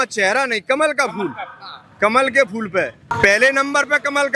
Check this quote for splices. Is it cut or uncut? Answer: cut